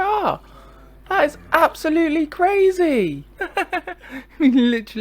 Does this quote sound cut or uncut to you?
cut